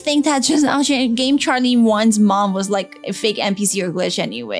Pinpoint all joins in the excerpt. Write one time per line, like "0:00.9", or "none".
none